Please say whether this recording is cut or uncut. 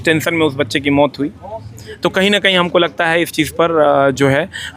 uncut